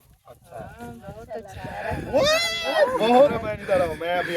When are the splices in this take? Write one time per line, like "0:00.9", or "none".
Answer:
0:03.3